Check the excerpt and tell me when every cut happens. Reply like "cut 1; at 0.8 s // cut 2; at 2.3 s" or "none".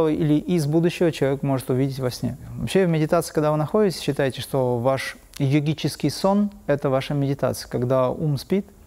cut 1; at 2.5 s